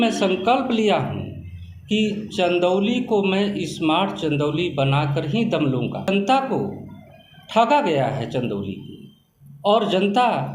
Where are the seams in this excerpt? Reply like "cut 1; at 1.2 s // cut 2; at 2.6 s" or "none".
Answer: cut 1; at 6.1 s